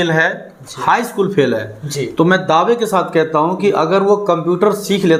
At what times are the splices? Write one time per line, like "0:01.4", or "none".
none